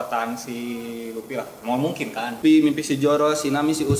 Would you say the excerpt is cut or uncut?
cut